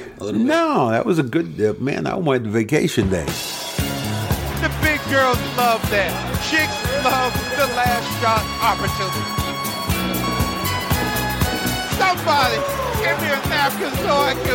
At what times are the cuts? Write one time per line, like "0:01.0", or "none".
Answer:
0:03.4